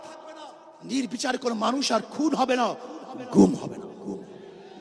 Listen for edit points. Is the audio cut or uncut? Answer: uncut